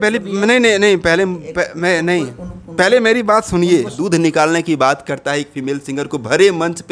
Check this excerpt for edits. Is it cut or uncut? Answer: cut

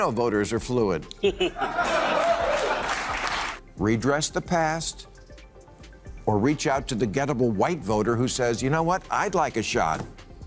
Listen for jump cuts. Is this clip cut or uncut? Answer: cut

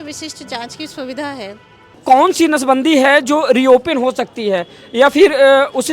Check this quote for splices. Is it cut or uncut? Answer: cut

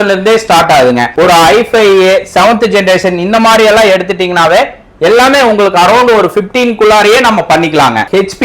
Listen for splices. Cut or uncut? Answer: uncut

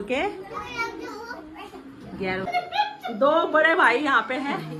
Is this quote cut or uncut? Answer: cut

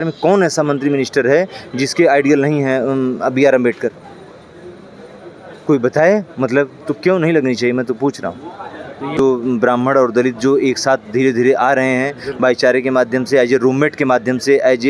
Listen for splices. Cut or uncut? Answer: cut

